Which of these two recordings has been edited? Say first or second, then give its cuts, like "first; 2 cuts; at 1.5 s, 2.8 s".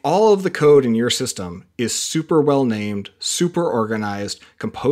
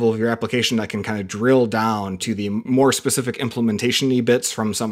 second; 1 cut; at 2.6 s